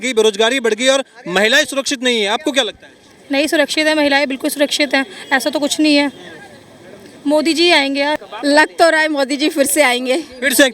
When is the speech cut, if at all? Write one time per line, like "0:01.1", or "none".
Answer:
0:08.2